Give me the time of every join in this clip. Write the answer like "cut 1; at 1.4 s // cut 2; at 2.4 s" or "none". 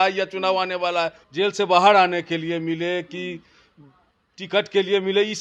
cut 1; at 1.2 s